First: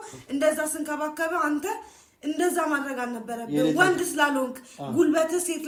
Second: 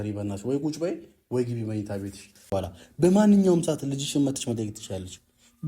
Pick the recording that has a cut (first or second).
second